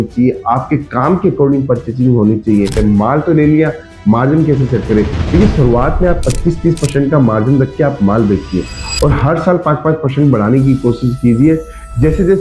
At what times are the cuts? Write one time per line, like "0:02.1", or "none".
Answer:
0:02.8